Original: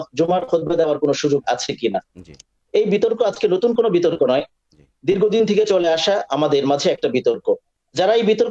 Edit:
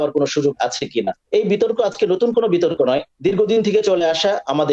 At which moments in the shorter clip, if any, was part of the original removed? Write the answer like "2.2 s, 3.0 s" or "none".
1.2 s, 3.1 s